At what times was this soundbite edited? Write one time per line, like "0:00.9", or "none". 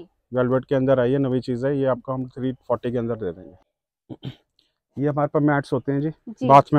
0:03.5